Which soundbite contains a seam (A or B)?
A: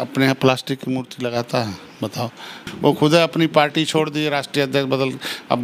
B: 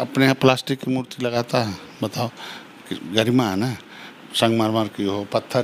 A